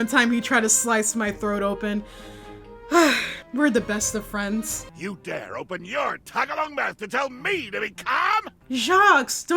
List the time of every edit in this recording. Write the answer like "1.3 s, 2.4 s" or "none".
4.8 s, 8.6 s